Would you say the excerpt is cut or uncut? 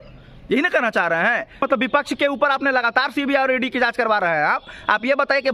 cut